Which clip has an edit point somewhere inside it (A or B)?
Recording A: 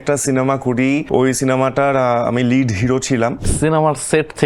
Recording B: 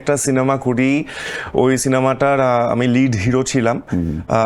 A